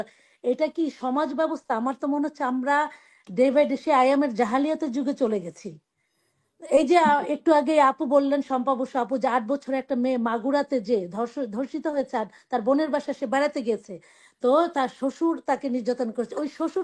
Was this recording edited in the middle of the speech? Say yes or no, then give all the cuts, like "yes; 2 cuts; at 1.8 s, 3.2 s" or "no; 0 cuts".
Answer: no; 0 cuts